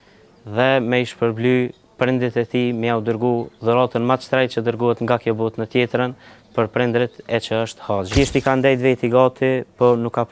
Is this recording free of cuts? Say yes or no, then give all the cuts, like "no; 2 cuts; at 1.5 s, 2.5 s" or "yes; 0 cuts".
no; 1 cut; at 8.1 s